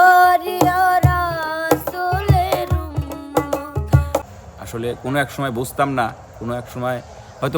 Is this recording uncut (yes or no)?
no